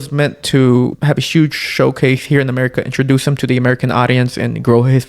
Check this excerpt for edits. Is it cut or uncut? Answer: cut